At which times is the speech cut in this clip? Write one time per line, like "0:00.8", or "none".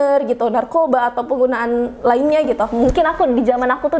0:02.7